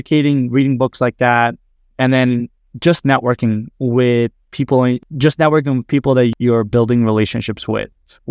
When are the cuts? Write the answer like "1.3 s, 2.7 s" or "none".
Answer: 5.0 s, 6.3 s